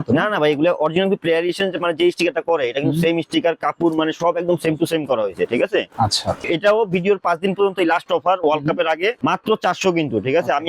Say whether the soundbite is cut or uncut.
cut